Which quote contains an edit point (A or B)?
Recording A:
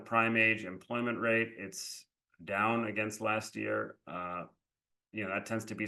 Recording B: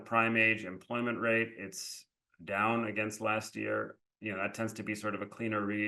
B